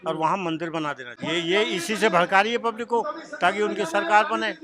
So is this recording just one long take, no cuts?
no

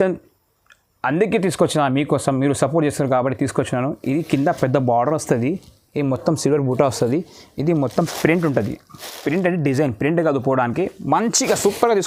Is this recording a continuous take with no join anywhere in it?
yes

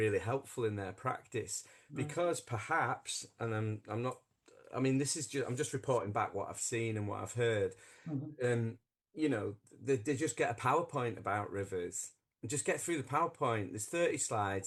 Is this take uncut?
yes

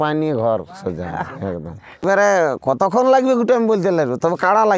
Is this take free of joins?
no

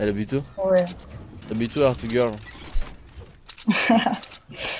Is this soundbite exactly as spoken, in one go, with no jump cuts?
no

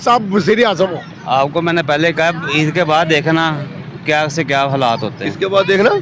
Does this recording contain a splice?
no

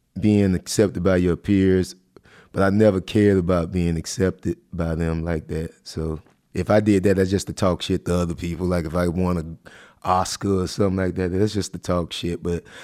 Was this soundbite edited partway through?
yes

